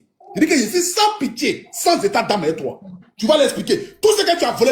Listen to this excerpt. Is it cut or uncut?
uncut